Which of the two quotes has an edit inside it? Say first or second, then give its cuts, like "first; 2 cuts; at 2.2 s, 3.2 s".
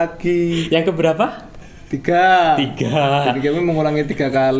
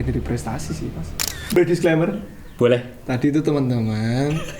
second; 1 cut; at 1.5 s